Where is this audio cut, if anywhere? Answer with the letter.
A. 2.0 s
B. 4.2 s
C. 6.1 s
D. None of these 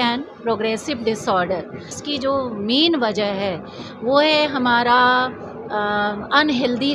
A